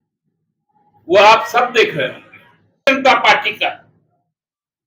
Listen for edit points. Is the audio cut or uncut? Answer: cut